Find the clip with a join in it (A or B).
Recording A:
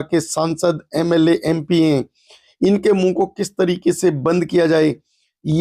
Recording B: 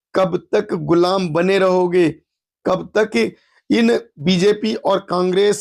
B